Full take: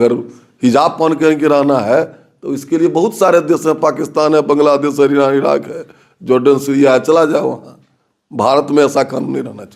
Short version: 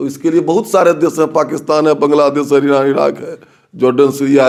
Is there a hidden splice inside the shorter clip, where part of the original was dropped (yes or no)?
no